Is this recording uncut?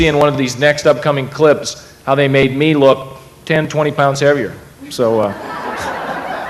yes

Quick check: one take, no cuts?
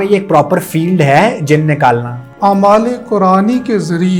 no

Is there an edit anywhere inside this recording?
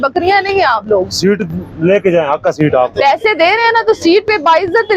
no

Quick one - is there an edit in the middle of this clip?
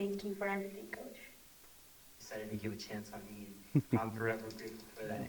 yes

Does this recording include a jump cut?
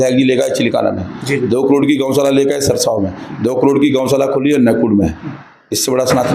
no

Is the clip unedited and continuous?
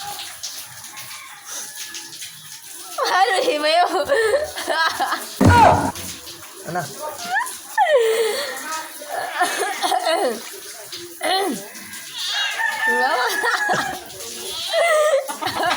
yes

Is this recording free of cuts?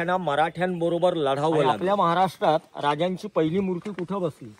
no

